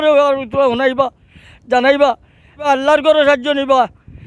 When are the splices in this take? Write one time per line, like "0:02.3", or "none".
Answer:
0:02.7